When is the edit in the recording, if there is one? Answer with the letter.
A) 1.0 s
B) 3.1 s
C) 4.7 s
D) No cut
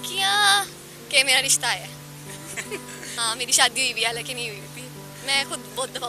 B